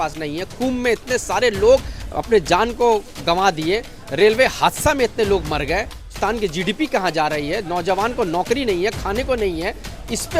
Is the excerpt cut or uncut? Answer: cut